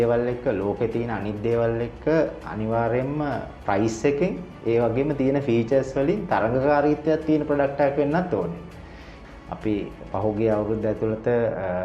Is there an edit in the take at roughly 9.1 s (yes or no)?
yes